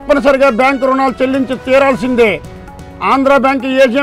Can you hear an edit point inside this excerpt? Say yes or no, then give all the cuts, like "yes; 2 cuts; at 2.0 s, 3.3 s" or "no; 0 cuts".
no; 0 cuts